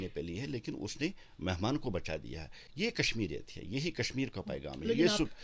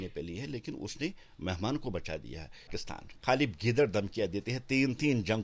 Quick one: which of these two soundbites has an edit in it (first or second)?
second